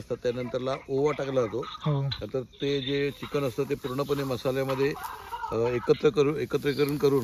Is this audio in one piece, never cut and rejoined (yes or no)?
yes